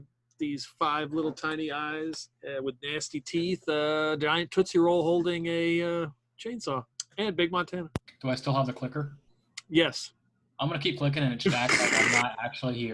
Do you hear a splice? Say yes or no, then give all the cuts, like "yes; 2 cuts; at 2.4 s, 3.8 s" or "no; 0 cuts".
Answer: yes; 3 cuts; at 2.3 s, 7.0 s, 8.1 s